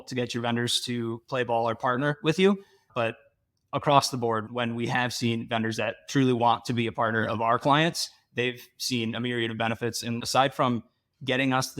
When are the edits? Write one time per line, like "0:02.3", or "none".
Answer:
0:04.5
0:10.2